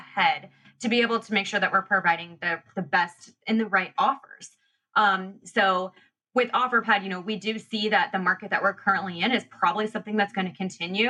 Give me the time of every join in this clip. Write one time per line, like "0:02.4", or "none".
none